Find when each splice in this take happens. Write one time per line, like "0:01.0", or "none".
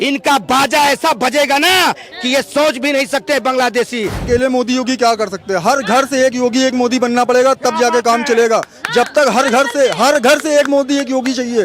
0:04.3